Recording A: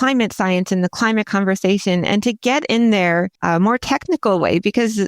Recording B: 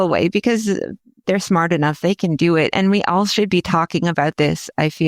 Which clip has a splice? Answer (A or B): A